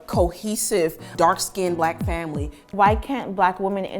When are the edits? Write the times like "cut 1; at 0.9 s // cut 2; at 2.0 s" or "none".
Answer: cut 1; at 1.1 s // cut 2; at 2.6 s